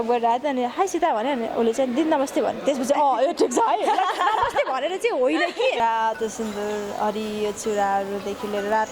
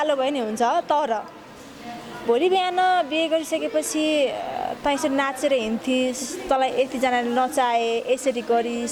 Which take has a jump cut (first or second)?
first